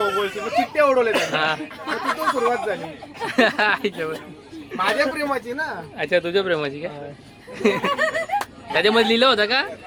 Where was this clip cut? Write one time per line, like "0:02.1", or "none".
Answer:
none